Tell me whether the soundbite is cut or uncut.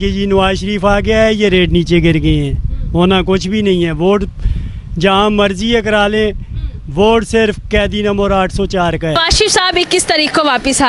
cut